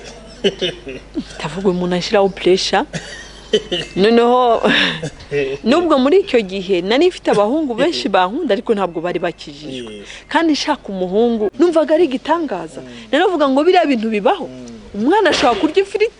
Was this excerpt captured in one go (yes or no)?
no